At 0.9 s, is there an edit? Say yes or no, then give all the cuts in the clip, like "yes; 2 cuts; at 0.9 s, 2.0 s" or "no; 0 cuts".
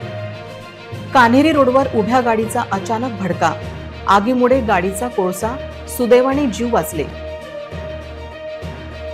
yes; 1 cut; at 0.9 s